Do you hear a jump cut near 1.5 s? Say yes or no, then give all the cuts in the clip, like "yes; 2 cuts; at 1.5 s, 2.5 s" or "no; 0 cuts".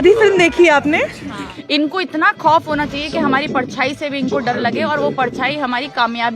yes; 1 cut; at 1.5 s